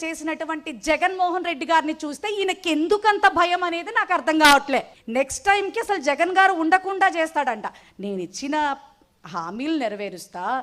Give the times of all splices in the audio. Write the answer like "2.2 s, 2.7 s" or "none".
5.0 s